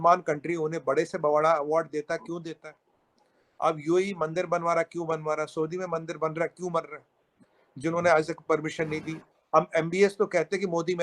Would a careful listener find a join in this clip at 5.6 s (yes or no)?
no